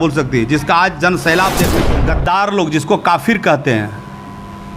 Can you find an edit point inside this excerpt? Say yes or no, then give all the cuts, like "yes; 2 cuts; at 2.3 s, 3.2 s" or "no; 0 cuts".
yes; 1 cut; at 1.8 s